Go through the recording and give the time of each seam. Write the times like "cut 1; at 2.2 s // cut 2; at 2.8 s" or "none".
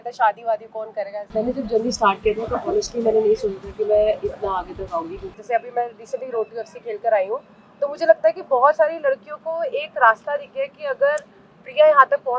cut 1; at 1.2 s // cut 2; at 5.2 s